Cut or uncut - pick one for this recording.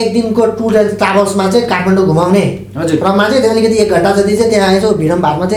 uncut